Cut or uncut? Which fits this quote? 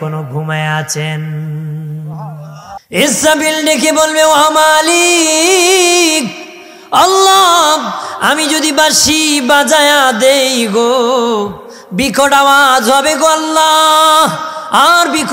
cut